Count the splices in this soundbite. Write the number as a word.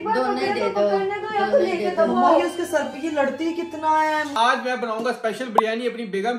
one